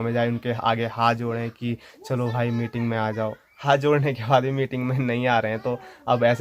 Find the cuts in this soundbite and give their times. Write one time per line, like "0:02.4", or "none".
none